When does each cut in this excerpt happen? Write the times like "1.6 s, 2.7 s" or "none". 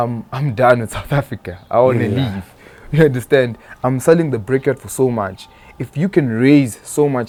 none